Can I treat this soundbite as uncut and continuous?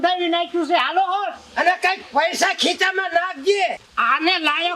no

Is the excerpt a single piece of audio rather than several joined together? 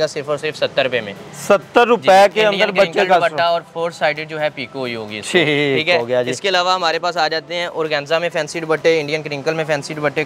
yes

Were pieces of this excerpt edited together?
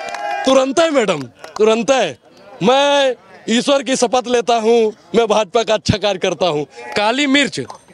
yes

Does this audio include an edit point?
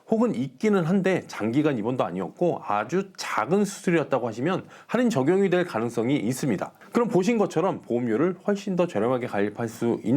yes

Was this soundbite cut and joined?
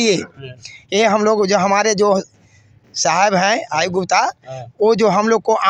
no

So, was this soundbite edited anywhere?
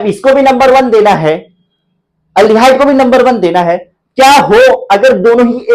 no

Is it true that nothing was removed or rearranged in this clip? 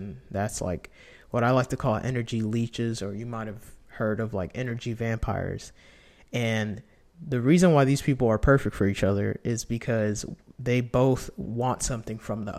yes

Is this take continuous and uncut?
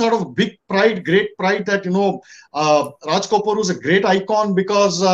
yes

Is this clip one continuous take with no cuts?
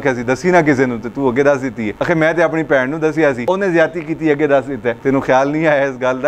no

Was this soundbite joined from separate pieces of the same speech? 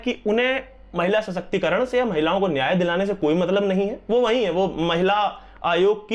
no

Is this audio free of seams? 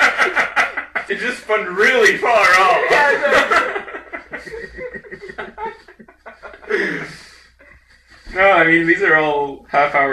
yes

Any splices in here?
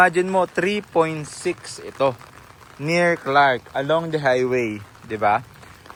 no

